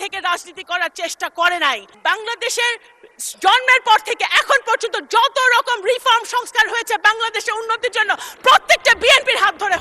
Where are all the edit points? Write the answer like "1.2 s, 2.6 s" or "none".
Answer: 1.9 s